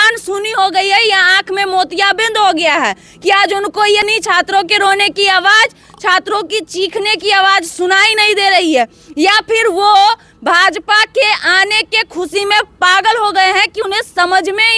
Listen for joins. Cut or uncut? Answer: uncut